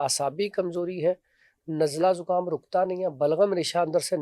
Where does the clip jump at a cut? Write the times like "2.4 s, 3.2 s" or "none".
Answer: none

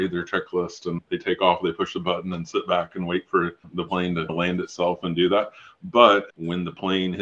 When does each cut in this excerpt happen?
none

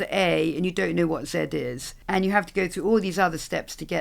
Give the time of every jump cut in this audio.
1.9 s

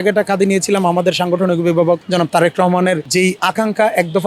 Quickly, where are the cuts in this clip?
none

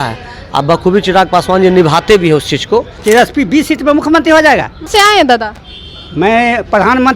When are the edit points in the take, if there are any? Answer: 2.9 s, 4.9 s

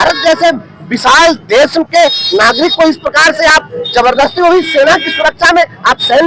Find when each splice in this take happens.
none

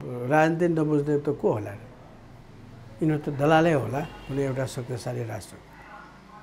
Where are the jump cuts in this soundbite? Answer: none

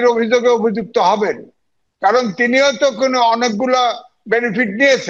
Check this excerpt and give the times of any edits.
none

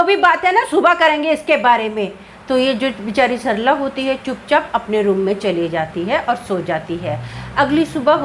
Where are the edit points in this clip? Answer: none

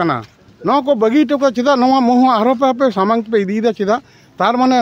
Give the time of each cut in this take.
none

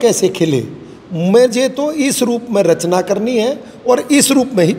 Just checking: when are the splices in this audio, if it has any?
none

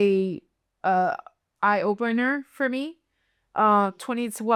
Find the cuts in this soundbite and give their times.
none

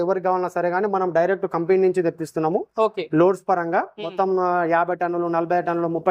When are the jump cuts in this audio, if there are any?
none

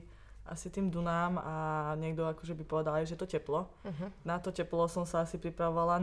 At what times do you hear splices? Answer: none

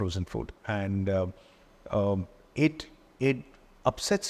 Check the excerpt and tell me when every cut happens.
none

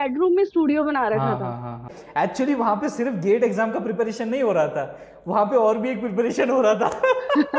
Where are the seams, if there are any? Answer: 2.0 s

